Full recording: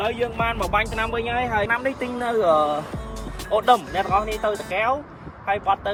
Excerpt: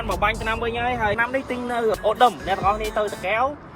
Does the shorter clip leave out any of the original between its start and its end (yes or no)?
yes